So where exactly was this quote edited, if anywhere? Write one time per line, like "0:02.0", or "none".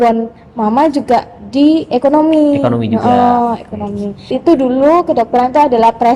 0:04.3